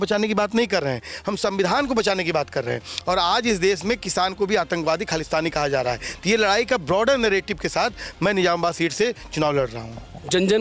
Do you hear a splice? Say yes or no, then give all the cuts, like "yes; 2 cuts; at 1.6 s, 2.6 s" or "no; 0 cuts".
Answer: no; 0 cuts